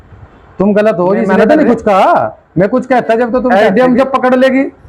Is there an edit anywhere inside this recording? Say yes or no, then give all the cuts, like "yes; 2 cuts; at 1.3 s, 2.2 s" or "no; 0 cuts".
yes; 2 cuts; at 1.3 s, 3.5 s